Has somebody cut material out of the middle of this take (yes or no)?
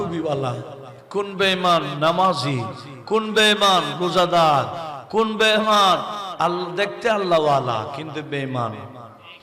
no